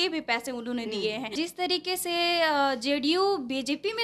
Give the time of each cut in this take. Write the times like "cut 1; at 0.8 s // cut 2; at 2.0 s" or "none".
cut 1; at 1.3 s